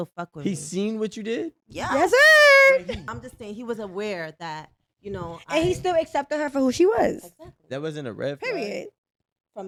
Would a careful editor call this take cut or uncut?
uncut